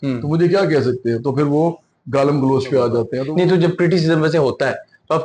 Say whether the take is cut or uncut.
cut